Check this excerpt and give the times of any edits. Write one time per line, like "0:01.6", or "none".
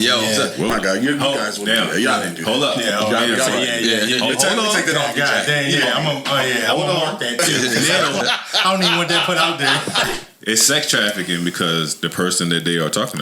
0:00.7
0:10.1